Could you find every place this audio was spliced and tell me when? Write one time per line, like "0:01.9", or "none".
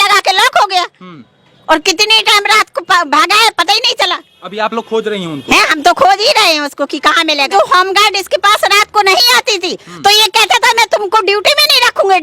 0:07.5